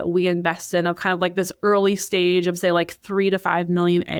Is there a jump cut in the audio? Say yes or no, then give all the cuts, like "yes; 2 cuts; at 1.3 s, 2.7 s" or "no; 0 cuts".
no; 0 cuts